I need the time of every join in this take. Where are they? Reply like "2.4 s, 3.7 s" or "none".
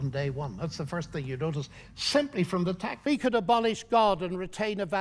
2.9 s